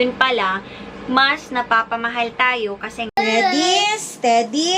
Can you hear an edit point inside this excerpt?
yes; 1 cut; at 3.1 s

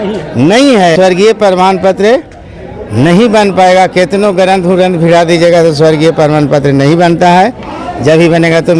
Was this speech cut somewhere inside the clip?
yes; 1 cut; at 1.2 s

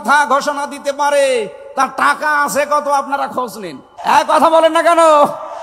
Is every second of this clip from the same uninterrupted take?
no; 1 cut; at 3.9 s

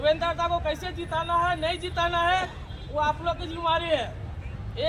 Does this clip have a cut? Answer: no; 0 cuts

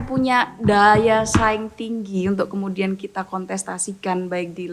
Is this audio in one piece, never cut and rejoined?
yes; 0 cuts

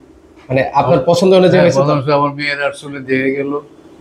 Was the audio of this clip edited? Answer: no; 0 cuts

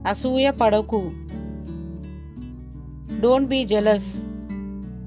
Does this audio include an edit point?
yes; 3 cuts; at 1.2 s, 2.5 s, 4.0 s

